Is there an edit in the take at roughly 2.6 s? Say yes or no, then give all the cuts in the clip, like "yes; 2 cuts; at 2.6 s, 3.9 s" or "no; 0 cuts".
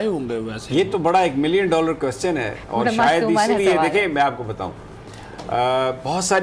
no; 0 cuts